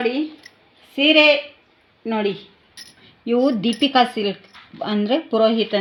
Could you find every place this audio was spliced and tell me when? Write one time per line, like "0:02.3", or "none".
none

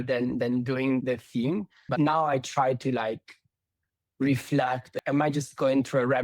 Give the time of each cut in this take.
0:01.9
0:04.9

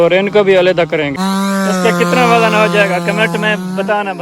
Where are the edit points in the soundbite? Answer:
0:01.2

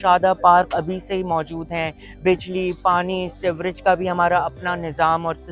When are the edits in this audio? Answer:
none

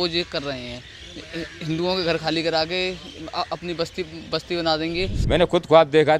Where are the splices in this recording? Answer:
0:05.1

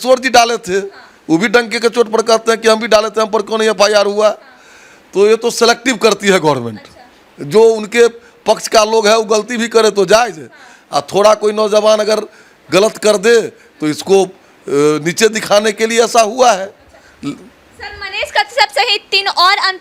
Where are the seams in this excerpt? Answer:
none

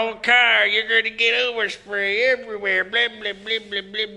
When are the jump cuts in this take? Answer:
none

